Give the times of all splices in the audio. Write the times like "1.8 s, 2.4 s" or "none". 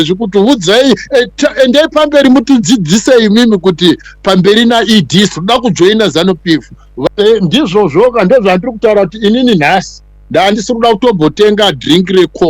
7.1 s